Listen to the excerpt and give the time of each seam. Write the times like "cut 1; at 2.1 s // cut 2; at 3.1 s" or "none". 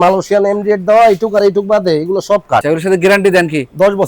cut 1; at 2.6 s